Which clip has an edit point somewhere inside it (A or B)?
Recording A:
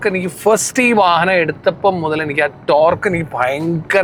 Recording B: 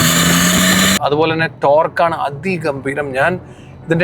B